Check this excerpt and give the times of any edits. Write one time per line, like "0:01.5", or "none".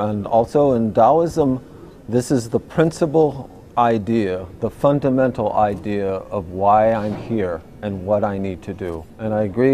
0:03.6